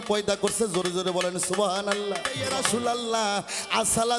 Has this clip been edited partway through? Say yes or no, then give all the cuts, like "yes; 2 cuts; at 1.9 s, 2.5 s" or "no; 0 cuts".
yes; 1 cut; at 2.5 s